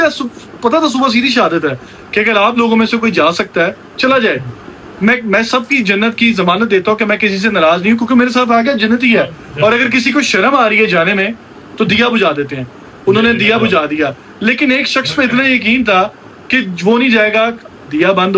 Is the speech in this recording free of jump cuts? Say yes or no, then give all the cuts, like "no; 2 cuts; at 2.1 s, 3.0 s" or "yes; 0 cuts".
yes; 0 cuts